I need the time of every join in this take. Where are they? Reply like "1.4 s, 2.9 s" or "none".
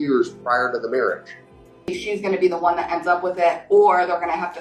2.0 s